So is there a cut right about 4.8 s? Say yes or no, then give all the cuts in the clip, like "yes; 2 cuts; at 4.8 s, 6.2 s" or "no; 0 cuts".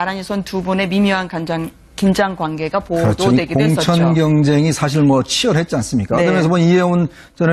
yes; 1 cut; at 4.8 s